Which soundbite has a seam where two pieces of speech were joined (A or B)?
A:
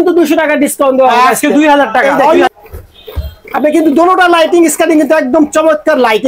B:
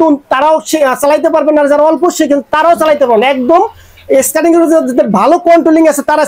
A